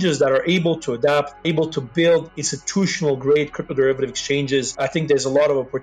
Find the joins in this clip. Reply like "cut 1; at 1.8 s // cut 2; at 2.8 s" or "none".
cut 1; at 1.4 s // cut 2; at 4.7 s

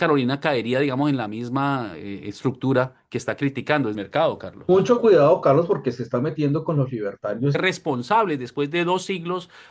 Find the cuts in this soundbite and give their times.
cut 1; at 4.0 s // cut 2; at 7.6 s

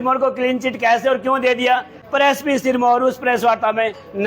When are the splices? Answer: cut 1; at 1.9 s

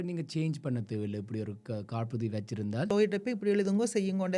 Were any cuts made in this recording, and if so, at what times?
cut 1; at 2.9 s

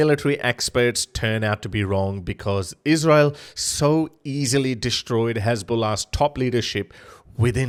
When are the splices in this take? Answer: none

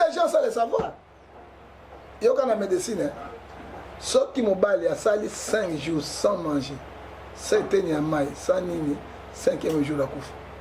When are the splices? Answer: none

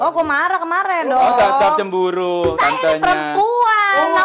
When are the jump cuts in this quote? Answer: none

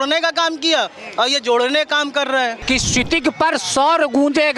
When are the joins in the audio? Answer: cut 1; at 2.6 s

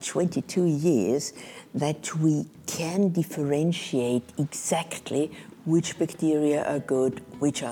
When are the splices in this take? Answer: none

